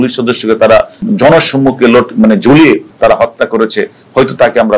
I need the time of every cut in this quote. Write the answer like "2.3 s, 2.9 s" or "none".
1.0 s